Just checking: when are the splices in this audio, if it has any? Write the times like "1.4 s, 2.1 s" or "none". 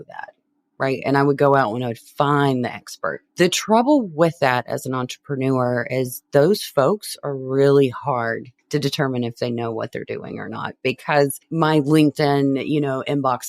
8.5 s, 11.4 s